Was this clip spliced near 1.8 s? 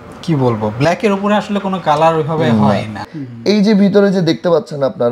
no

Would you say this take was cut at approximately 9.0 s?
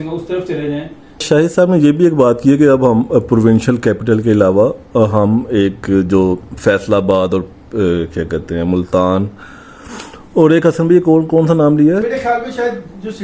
no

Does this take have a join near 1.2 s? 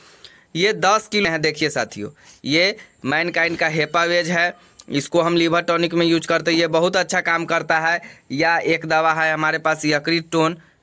yes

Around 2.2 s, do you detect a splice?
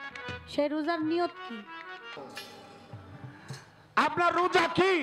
yes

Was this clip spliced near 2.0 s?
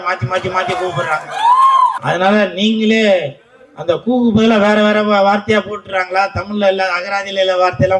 yes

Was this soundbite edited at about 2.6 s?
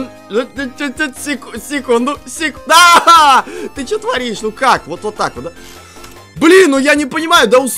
no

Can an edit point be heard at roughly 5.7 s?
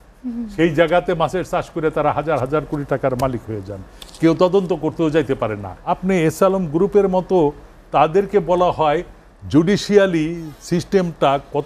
yes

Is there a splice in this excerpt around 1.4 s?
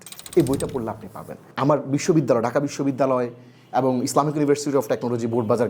yes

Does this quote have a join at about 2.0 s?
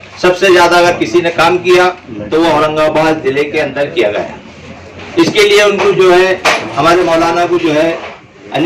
no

